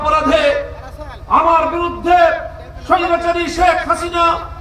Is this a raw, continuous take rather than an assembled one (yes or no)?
yes